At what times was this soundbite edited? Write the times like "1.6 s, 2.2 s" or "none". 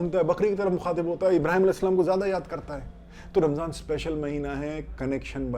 none

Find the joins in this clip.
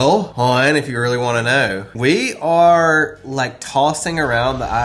1.9 s

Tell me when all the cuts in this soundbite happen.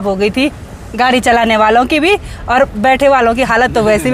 none

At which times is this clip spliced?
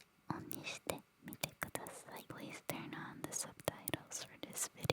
2.3 s

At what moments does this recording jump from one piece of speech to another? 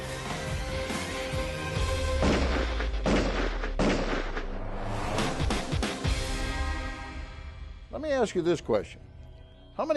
none

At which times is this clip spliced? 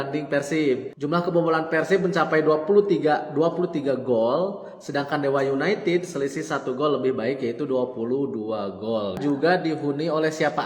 0.9 s, 9.2 s

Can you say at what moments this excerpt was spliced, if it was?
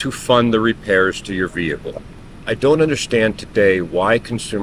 2.1 s

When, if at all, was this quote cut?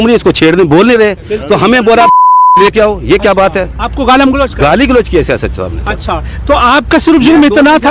none

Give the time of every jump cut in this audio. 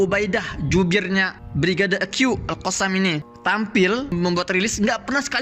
1.4 s, 3.3 s, 4.1 s

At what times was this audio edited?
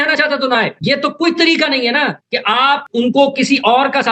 none

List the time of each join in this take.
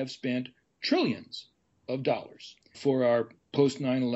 2.8 s

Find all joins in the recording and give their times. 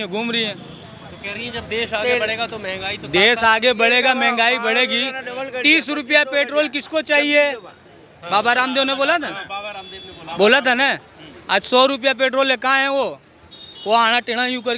none

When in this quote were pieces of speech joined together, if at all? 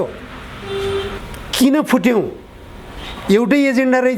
1.2 s

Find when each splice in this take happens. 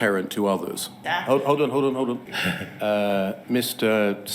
1.0 s, 2.3 s

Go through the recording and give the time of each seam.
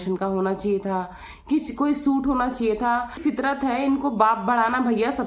3.2 s

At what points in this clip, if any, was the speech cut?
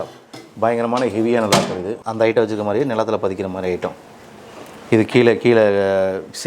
2.0 s

